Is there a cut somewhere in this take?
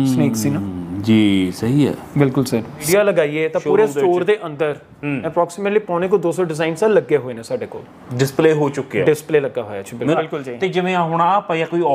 yes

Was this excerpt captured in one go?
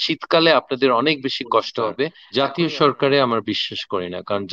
no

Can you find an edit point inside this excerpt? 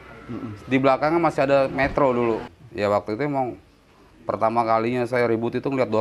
yes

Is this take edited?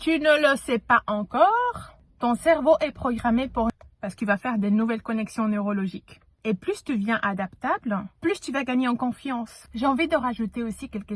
yes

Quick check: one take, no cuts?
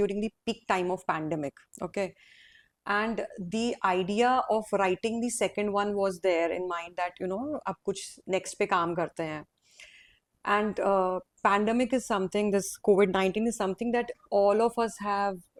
yes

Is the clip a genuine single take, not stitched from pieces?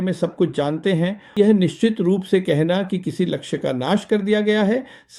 no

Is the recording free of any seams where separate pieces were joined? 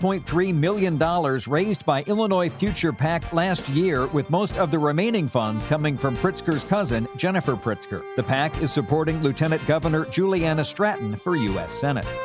yes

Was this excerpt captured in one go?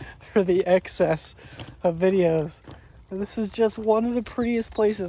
yes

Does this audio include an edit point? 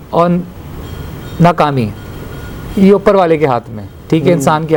no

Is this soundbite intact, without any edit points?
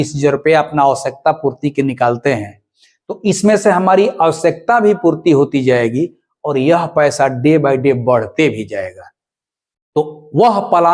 yes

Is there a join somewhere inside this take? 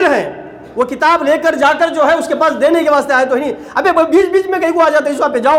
no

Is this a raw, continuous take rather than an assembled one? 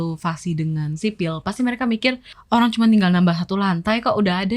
no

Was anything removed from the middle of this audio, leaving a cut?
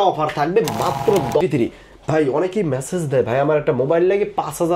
yes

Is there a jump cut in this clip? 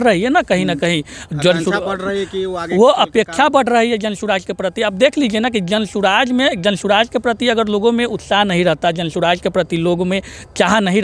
no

